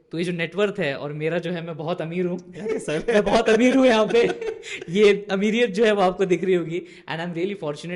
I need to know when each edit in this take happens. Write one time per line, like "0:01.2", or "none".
none